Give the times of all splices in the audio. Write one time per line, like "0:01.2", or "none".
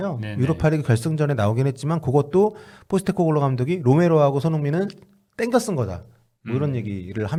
none